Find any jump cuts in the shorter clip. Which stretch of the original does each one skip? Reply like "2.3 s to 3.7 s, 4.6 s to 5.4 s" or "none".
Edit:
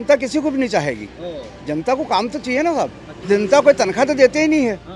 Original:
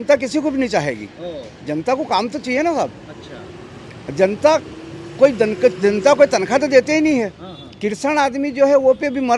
3.2 s to 5.8 s